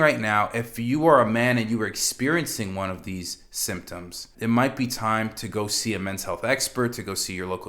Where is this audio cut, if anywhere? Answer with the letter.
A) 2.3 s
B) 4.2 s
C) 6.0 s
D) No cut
B